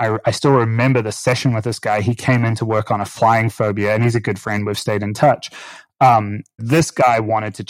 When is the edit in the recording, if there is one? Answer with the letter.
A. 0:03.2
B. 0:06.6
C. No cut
B